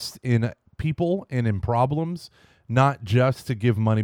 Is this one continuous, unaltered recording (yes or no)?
yes